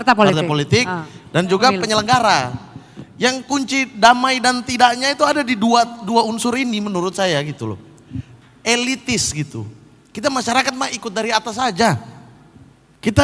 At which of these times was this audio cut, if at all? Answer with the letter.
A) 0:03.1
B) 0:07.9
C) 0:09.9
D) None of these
D